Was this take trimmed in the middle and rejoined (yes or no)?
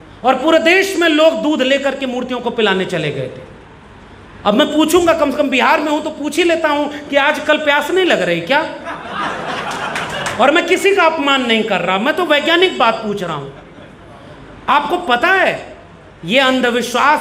no